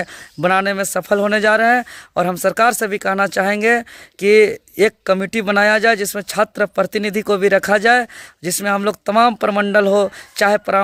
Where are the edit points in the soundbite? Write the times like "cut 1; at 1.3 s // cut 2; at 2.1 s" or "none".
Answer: none